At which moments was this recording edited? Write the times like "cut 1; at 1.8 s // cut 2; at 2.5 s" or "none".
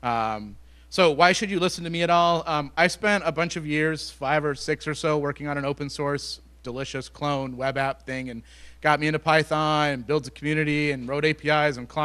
cut 1; at 5.5 s